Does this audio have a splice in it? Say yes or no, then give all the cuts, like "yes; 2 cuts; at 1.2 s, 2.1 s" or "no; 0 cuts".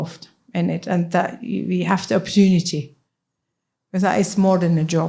no; 0 cuts